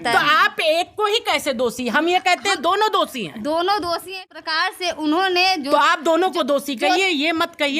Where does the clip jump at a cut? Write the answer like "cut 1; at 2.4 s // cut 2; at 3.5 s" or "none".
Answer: cut 1; at 4.2 s